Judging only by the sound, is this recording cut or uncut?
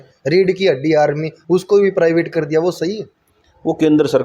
uncut